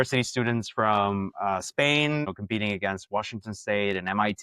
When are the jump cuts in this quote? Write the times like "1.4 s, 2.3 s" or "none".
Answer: 2.3 s